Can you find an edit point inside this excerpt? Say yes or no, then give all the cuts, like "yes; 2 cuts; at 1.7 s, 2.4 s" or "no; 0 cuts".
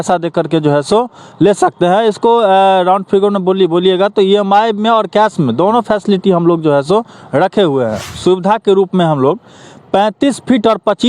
yes; 1 cut; at 8.1 s